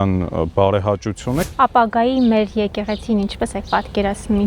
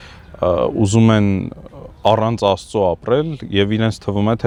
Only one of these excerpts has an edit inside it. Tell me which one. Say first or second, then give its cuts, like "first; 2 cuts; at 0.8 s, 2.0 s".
first; 1 cut; at 1.4 s